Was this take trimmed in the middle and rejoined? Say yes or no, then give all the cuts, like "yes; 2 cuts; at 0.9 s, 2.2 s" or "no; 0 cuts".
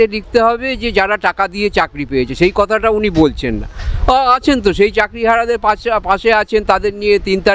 no; 0 cuts